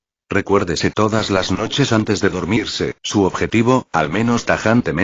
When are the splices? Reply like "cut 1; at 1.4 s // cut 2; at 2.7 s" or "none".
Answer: none